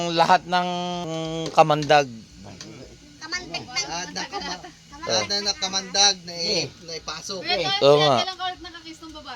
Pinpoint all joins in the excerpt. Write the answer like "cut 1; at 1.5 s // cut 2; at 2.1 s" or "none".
cut 1; at 1.1 s